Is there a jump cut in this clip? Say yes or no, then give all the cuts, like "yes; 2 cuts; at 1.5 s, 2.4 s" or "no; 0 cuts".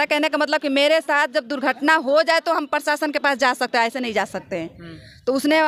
no; 0 cuts